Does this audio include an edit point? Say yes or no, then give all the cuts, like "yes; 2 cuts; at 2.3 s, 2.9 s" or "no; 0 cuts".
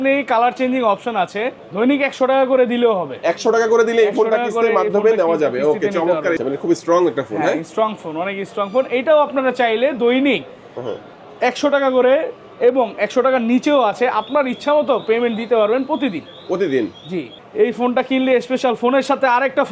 yes; 3 cuts; at 1.6 s, 6.4 s, 17.4 s